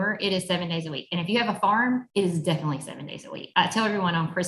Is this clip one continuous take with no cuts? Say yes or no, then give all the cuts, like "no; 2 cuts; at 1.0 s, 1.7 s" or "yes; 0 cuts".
no; 2 cuts; at 2.1 s, 3.4 s